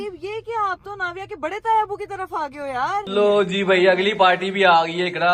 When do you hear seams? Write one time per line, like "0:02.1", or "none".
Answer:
0:03.1

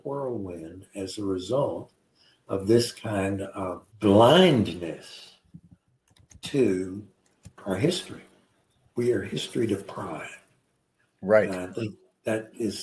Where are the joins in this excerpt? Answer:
0:03.8
0:07.6

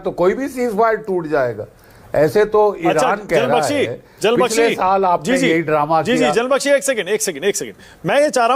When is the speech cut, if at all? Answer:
none

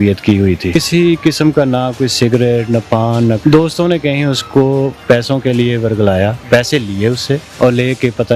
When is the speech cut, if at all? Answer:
0:00.8
0:03.4
0:05.0
0:06.4
0:07.5

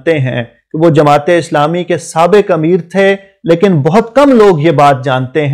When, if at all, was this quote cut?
none

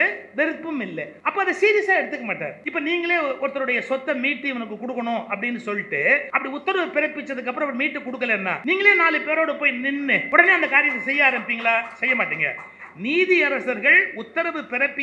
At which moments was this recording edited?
0:01.1
0:02.6
0:06.3
0:08.6
0:10.2

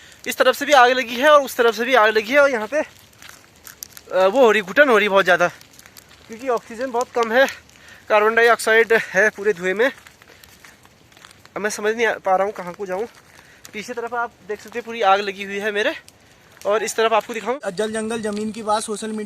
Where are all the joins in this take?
0:17.5

